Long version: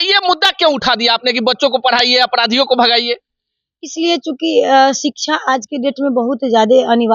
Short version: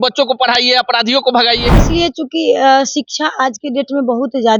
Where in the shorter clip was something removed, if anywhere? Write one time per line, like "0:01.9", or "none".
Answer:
0:01.8